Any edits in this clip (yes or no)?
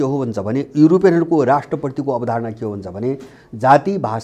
no